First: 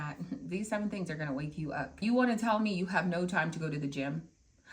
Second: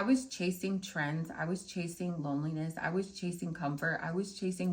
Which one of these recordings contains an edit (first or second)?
first